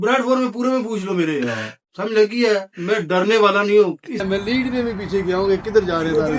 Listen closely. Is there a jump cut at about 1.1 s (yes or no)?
no